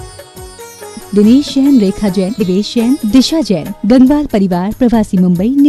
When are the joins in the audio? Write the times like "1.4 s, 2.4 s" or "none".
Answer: 2.5 s

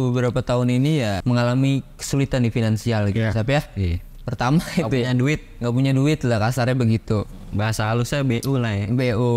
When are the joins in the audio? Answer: 1.2 s

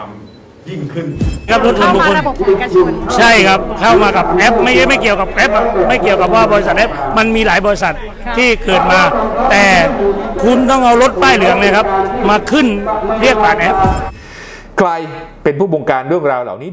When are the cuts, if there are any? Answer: 1.5 s, 14.1 s

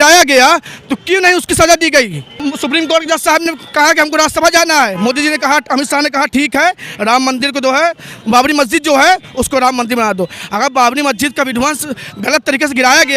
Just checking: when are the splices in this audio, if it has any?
2.3 s

